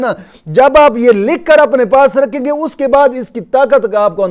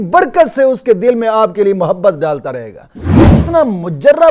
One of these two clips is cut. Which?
second; 1 cut; at 3.2 s

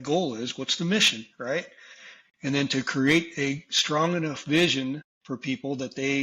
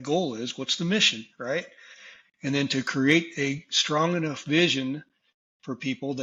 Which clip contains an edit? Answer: first; 1 cut; at 5.1 s

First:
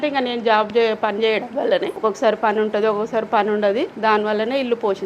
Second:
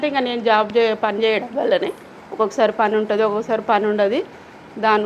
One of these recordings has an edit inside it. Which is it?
first; 2 cuts; at 1.9 s, 3.9 s

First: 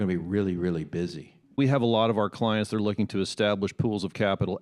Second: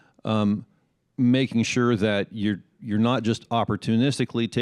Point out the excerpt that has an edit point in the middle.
first; 1 cut; at 1.6 s

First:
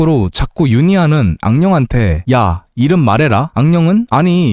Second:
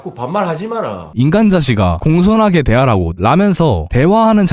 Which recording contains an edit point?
second; 2 cuts; at 1.1 s, 3.1 s

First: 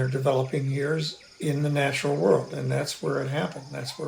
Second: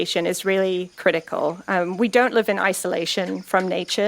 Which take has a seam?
second; 1 cut; at 0.9 s

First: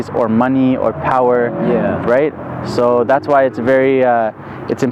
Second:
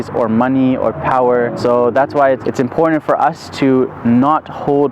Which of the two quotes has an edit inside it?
second; 2 cuts; at 1.5 s, 2.4 s

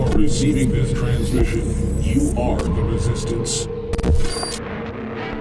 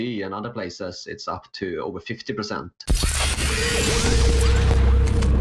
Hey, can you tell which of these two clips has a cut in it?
second; 1 cut; at 2.7 s

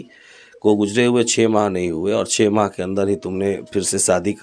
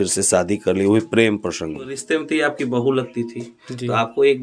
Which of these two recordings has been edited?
second; 1 cut; at 2.0 s

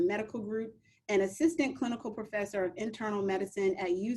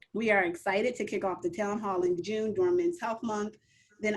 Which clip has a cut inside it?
second; 1 cut; at 2.2 s

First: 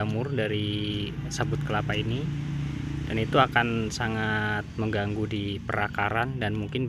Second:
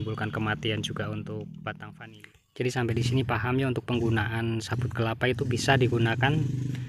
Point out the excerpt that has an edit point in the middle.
second; 1 cut; at 1.9 s

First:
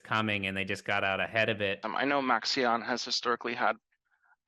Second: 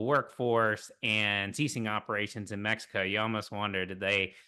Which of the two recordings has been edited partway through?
first; 1 cut; at 1.8 s

